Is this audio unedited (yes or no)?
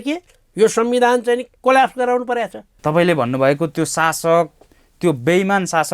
no